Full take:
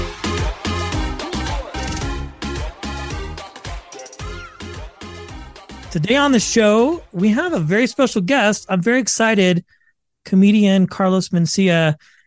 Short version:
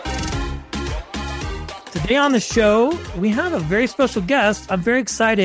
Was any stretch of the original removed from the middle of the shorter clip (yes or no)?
yes